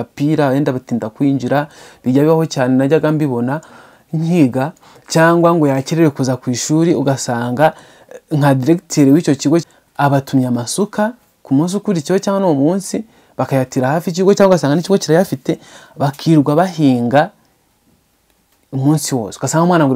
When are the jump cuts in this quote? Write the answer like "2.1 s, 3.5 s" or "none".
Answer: 9.6 s